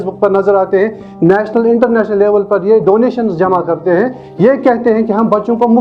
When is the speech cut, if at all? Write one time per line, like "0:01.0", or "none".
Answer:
none